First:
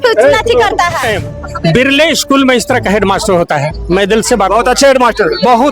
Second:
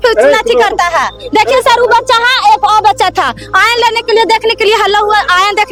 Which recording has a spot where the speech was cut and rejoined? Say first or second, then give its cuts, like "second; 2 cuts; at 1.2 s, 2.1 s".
first; 1 cut; at 1.1 s